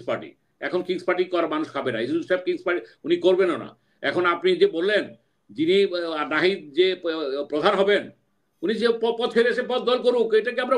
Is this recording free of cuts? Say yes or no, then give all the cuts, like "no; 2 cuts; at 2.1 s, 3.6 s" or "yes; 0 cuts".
yes; 0 cuts